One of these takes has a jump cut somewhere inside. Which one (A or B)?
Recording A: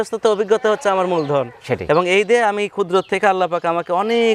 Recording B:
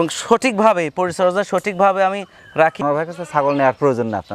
B